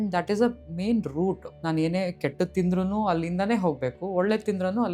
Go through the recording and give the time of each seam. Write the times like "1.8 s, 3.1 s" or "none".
1.5 s